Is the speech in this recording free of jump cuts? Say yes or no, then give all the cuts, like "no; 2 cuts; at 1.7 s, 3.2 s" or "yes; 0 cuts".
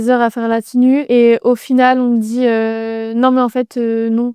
no; 1 cut; at 1.0 s